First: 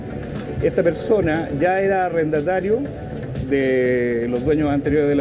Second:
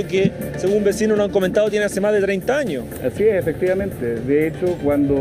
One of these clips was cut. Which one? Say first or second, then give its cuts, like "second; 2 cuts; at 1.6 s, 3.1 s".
second; 1 cut; at 2.9 s